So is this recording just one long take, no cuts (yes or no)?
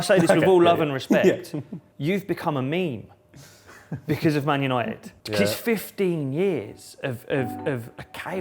no